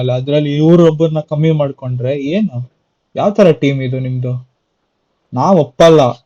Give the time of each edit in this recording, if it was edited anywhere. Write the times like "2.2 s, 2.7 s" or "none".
none